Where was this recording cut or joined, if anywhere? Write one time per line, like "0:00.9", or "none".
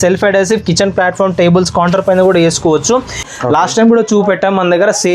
0:03.4